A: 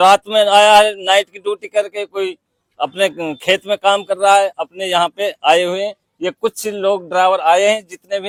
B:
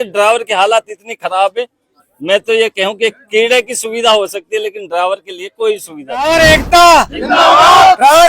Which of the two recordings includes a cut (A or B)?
B